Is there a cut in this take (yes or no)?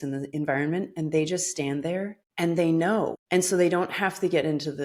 yes